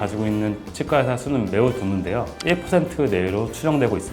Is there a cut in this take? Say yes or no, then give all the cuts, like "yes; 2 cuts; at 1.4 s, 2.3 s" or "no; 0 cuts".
yes; 1 cut; at 2.3 s